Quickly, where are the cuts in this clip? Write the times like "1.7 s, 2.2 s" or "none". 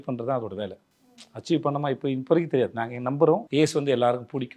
3.5 s